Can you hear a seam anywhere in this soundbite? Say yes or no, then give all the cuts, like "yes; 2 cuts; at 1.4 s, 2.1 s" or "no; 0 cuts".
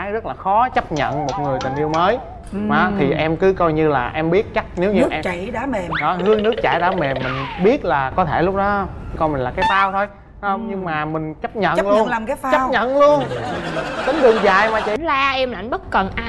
yes; 1 cut; at 14.9 s